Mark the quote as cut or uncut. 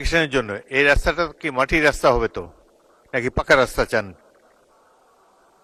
uncut